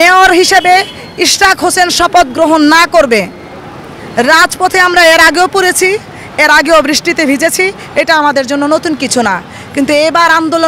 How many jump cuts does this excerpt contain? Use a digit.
0